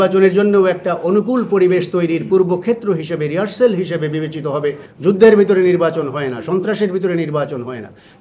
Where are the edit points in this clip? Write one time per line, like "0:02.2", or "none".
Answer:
0:04.8